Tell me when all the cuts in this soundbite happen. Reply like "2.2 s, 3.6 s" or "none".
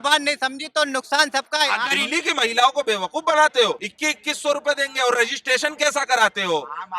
1.9 s, 3.9 s